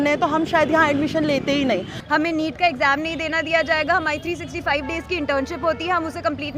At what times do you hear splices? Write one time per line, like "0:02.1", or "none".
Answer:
0:02.0